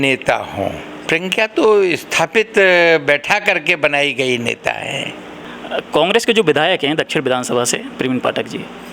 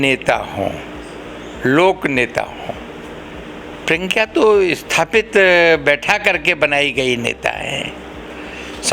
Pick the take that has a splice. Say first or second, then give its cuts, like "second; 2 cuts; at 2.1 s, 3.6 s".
first; 2 cuts; at 0.9 s, 5.4 s